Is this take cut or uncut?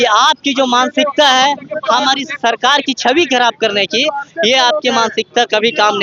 uncut